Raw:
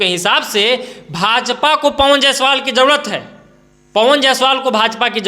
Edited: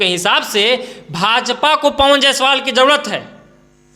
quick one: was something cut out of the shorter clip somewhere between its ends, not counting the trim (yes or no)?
no